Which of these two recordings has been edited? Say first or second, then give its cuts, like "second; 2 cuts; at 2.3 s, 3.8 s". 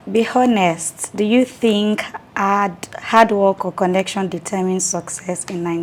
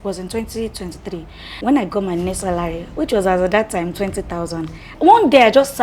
second; 2 cuts; at 1.6 s, 4.9 s